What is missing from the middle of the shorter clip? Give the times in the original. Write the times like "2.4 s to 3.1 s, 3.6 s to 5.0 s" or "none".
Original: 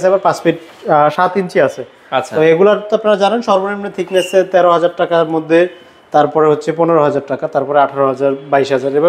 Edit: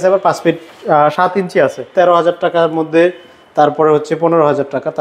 1.9 s to 4.5 s